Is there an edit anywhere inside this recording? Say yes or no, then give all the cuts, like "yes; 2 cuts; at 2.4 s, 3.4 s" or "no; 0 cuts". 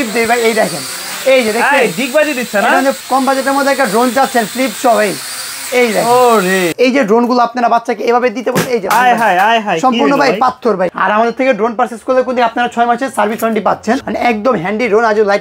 yes; 4 cuts; at 3.0 s, 6.7 s, 10.9 s, 14.0 s